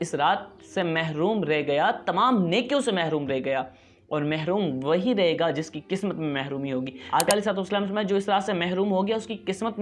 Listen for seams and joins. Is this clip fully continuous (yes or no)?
no